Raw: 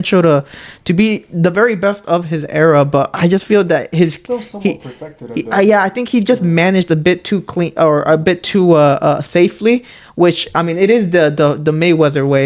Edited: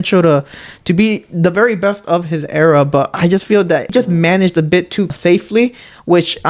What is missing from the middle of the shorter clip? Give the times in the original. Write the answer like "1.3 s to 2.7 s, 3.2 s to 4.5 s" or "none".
3.9 s to 6.2 s, 7.5 s to 9.2 s